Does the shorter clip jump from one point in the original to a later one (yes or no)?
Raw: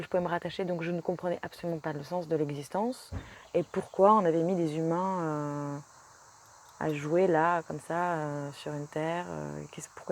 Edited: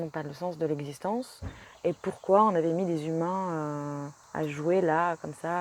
yes